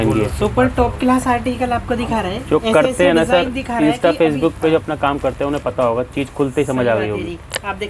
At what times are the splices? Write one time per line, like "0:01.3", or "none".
none